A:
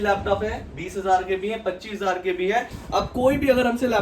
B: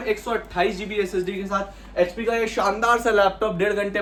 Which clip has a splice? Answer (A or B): A